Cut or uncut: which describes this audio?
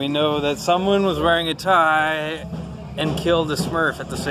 uncut